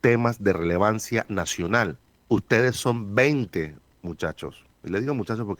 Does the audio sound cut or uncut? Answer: cut